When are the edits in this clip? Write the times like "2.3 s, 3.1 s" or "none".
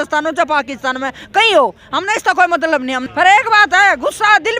3.0 s